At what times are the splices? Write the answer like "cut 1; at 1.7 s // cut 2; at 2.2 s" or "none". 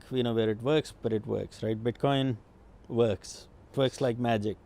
cut 1; at 3.7 s